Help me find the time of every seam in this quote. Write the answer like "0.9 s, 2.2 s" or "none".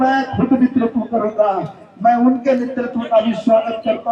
none